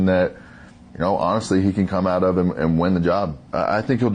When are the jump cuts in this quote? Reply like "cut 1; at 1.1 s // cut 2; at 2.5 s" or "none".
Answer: none